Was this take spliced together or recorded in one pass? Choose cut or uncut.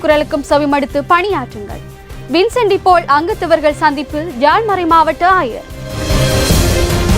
cut